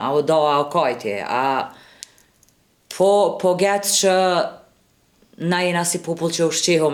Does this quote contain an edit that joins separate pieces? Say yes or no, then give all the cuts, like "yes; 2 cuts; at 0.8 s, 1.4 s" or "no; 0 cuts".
no; 0 cuts